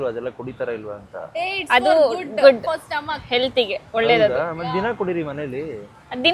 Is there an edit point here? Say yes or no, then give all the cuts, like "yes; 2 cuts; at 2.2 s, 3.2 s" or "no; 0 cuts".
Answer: no; 0 cuts